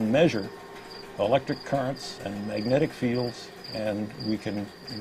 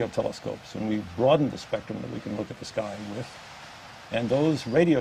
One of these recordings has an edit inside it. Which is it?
second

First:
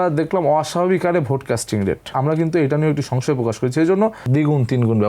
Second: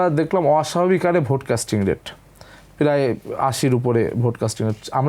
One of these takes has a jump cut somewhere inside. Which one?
first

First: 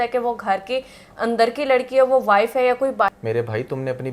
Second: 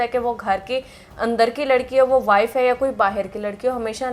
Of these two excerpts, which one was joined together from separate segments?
first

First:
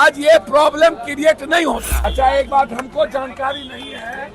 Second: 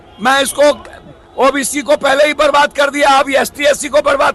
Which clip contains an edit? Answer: first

